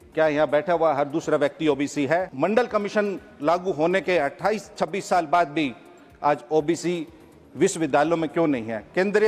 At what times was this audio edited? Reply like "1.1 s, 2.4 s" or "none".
2.3 s